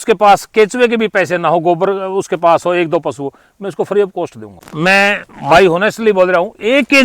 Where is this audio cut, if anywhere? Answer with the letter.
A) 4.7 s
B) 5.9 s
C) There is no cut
A